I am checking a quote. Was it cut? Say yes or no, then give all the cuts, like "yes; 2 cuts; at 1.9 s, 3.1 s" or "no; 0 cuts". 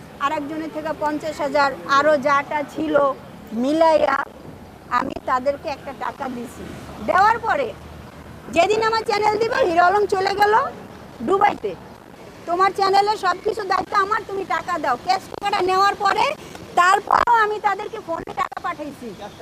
no; 0 cuts